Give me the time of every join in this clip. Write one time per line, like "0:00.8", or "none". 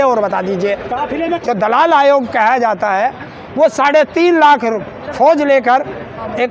0:01.4